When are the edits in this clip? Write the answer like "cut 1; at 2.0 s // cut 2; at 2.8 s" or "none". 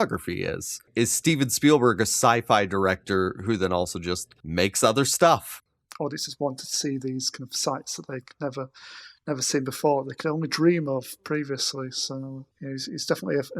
cut 1; at 0.9 s // cut 2; at 4.3 s // cut 3; at 5.5 s // cut 4; at 12.5 s